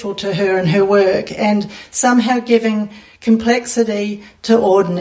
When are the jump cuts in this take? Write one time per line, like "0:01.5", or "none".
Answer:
none